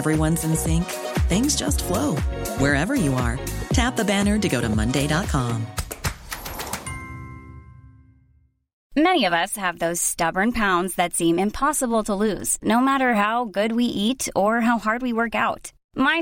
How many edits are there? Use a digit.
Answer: 1